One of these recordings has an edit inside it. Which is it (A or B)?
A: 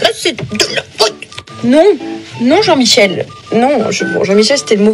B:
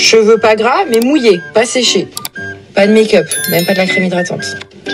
A